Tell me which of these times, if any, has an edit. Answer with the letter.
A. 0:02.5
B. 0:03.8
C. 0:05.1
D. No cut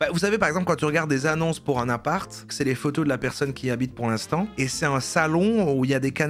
A